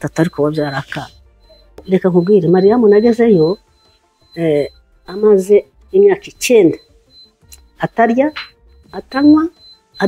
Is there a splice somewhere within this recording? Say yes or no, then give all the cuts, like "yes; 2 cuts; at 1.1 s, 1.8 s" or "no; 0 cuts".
yes; 1 cut; at 1.8 s